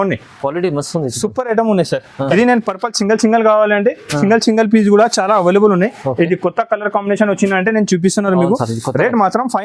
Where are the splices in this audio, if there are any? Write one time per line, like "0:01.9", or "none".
0:02.3